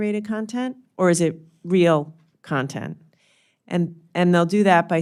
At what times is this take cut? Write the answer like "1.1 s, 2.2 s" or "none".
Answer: none